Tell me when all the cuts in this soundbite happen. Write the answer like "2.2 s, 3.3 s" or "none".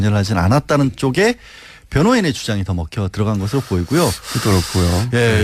none

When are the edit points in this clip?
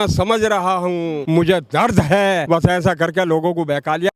1.2 s, 2.4 s

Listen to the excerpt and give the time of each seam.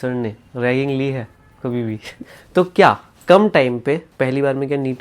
2.2 s, 4.1 s

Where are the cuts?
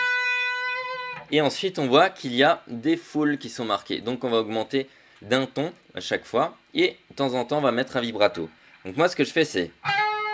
5.0 s

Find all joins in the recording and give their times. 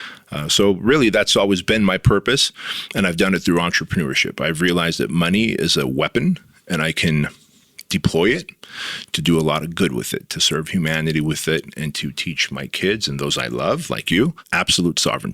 14.4 s

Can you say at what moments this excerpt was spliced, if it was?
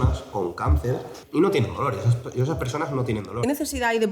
1.2 s, 3.4 s

